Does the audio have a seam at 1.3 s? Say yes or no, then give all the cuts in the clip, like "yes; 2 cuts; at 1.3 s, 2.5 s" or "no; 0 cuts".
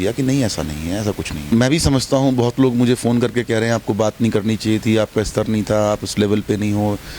yes; 1 cut; at 1.3 s